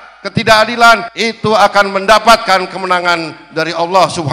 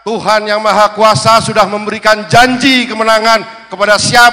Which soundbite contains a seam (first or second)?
first